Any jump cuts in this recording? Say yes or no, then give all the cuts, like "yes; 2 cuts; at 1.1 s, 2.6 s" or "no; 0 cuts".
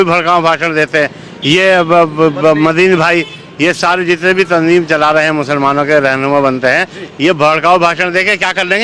no; 0 cuts